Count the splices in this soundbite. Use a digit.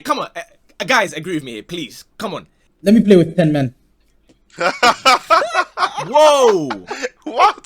1